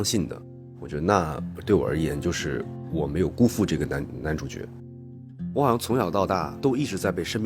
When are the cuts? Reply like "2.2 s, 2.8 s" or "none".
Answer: 1.5 s, 2.8 s, 4.8 s, 6.5 s